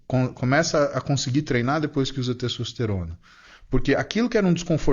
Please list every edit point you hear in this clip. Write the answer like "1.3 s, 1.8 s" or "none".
none